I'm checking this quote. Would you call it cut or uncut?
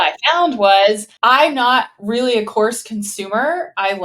cut